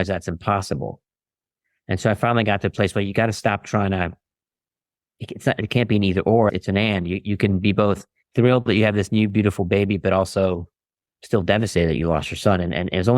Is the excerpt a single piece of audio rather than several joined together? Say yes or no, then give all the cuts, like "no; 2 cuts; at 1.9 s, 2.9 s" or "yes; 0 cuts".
no; 1 cut; at 8.2 s